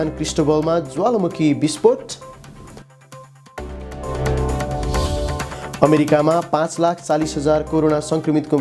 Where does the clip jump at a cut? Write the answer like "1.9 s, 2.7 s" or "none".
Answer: none